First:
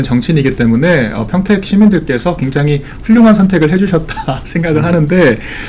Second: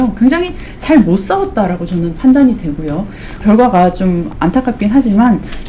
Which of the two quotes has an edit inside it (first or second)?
second